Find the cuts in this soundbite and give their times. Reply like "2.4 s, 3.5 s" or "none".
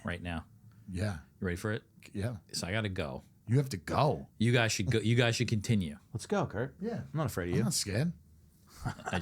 3.3 s, 4.3 s